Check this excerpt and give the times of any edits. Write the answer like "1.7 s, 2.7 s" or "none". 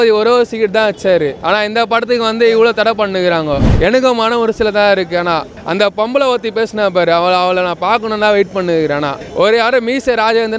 1.4 s, 3.7 s, 5.5 s, 9.2 s